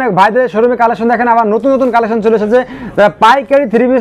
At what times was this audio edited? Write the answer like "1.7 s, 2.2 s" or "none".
none